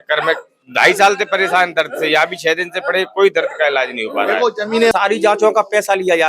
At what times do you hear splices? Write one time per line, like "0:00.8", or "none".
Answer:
0:04.9